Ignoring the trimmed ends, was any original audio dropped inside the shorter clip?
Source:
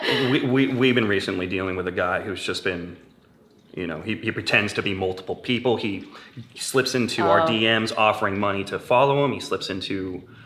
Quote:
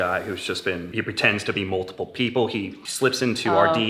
yes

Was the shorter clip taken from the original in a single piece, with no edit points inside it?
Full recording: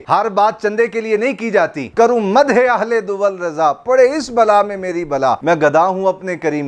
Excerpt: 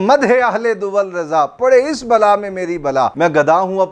yes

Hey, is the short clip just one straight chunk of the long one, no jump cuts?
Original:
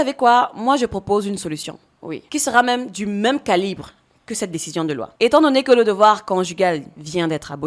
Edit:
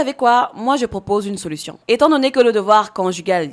no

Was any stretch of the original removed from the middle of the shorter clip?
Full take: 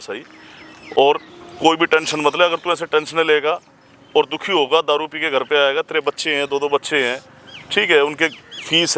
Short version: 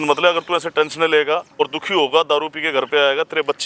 yes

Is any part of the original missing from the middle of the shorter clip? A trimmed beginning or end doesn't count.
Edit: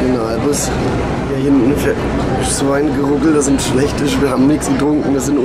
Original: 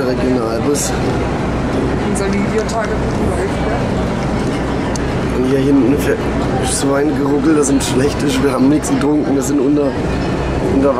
yes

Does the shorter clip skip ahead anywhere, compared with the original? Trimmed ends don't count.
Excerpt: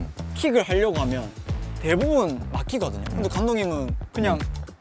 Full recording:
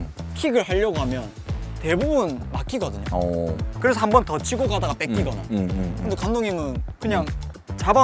yes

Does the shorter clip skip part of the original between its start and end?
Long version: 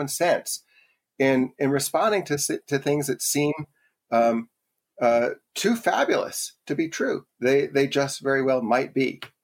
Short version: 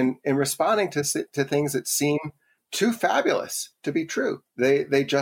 yes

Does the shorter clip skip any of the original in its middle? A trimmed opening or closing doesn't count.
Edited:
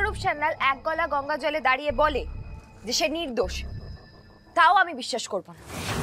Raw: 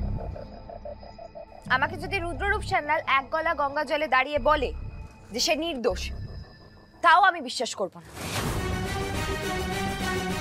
no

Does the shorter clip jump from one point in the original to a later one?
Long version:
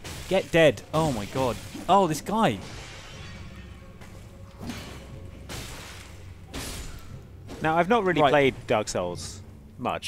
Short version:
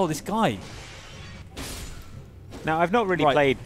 yes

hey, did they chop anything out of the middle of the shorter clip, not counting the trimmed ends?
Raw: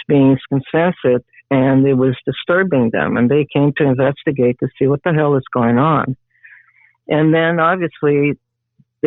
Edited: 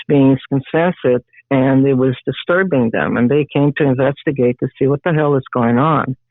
no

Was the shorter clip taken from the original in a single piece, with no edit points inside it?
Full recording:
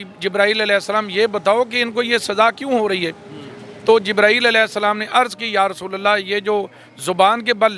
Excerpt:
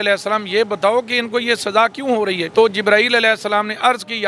no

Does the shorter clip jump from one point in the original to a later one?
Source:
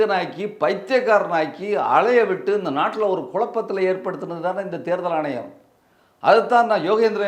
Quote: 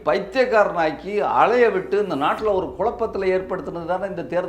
no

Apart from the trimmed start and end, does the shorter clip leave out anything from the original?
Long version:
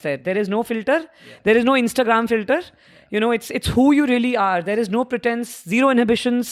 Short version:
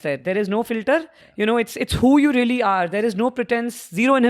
yes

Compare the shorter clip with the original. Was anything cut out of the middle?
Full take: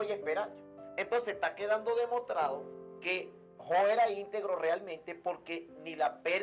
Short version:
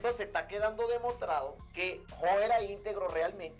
yes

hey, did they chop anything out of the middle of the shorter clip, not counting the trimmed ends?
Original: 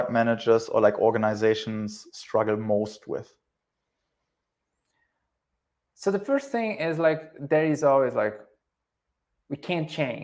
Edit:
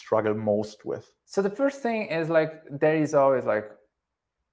yes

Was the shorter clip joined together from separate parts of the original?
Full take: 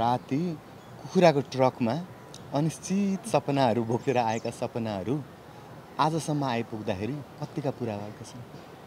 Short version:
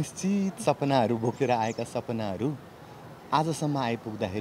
no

